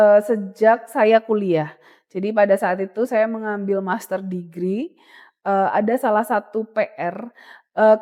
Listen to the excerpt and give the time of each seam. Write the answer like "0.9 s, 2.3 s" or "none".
none